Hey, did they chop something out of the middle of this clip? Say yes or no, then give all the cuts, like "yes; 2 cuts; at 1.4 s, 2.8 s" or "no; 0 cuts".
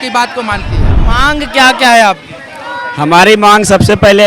yes; 1 cut; at 1.0 s